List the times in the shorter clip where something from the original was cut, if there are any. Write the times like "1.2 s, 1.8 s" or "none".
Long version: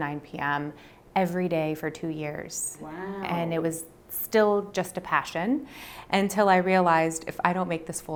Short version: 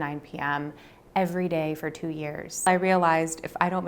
2.7 s

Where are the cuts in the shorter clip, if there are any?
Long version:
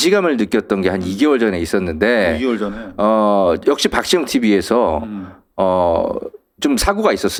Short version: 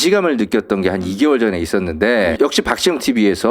2.3 s

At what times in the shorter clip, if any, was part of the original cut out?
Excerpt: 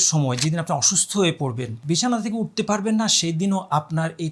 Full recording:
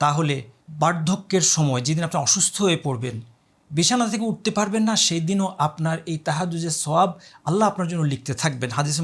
1.7 s

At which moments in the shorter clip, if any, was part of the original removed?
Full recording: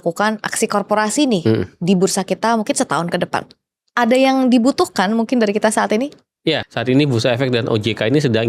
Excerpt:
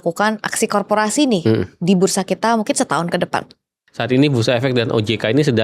3.9 s

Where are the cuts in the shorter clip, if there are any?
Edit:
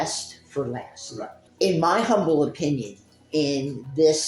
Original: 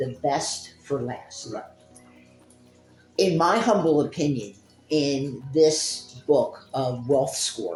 1.4 s

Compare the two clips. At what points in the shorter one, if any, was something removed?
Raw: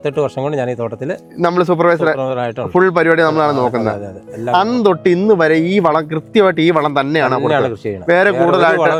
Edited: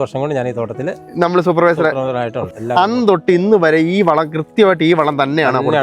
2.4 s

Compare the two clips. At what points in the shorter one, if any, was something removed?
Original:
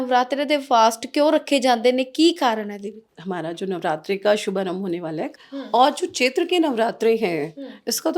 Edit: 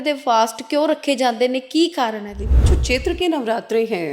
2.7 s

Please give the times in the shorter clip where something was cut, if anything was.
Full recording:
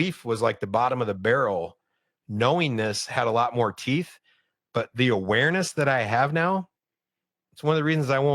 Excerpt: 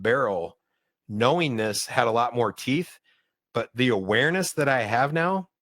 none

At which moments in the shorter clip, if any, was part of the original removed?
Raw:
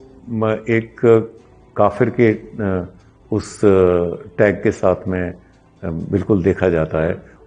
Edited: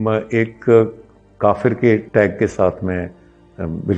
2.1 s

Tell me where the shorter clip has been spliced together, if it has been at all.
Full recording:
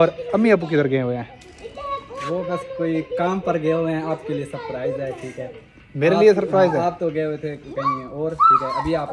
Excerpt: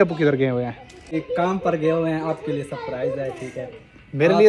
1.1 s

